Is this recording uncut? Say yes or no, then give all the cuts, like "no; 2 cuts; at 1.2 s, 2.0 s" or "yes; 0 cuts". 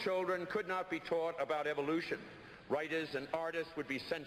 yes; 0 cuts